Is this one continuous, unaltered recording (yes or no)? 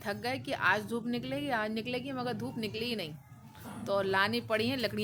yes